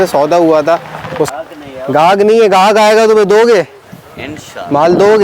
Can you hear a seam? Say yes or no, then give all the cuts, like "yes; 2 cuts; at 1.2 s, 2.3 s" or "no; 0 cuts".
yes; 1 cut; at 1.3 s